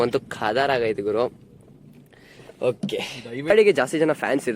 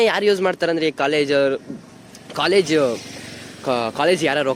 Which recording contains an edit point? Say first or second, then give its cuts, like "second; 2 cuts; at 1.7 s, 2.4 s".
first; 1 cut; at 3.5 s